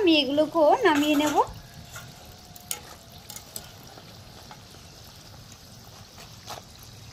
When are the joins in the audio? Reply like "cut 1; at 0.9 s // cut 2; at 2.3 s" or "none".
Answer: none